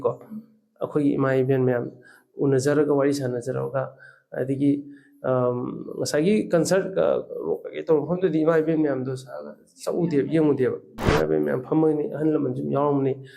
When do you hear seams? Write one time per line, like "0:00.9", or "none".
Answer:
0:11.0